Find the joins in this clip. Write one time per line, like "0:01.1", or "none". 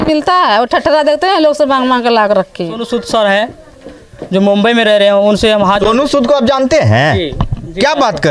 0:02.9

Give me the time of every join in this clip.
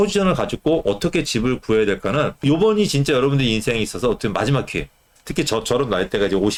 none

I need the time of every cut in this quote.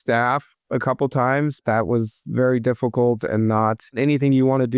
0:01.6

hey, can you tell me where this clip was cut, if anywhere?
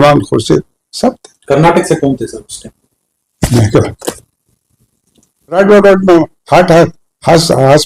0:05.6

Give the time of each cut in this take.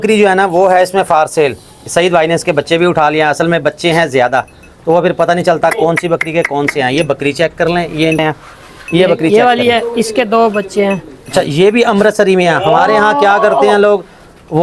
0:08.2

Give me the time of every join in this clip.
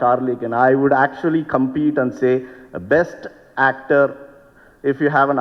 none

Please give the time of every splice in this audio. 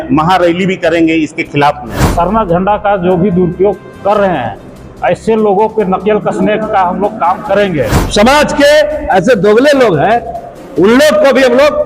0:02.0
0:08.0

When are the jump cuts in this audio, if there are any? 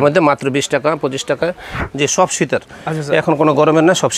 0:01.7

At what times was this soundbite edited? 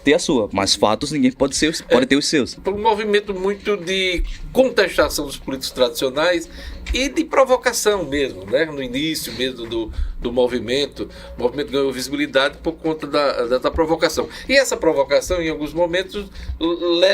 0:02.6

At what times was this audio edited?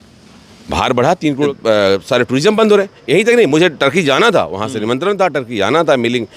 0:01.5

